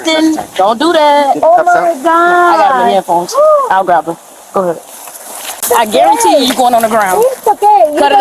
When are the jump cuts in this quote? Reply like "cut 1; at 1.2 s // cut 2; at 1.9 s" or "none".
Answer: cut 1; at 5.6 s